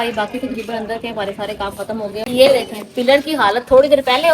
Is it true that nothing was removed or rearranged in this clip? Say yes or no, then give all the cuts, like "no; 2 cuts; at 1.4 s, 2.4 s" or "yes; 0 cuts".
no; 1 cut; at 2.2 s